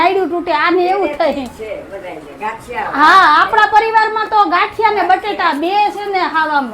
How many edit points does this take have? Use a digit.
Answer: 0